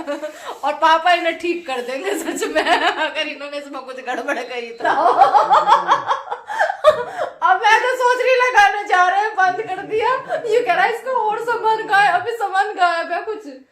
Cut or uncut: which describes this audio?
cut